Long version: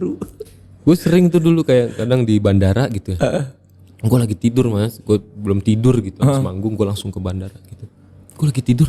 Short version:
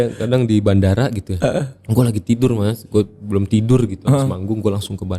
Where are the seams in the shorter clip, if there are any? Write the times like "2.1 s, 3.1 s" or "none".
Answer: 1.8 s